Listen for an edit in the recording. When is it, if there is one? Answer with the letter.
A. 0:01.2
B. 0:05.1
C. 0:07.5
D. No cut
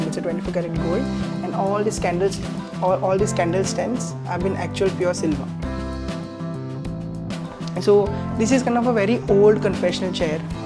D